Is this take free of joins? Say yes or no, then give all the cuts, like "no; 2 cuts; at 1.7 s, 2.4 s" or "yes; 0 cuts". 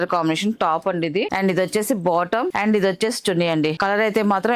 no; 3 cuts; at 1.3 s, 2.5 s, 3.8 s